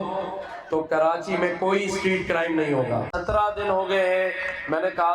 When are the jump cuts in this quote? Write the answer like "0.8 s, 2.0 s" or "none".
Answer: 3.1 s